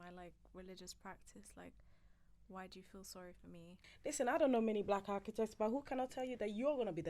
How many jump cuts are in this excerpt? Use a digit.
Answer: 1